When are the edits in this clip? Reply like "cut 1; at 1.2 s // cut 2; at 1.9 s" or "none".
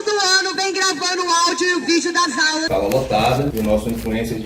cut 1; at 2.6 s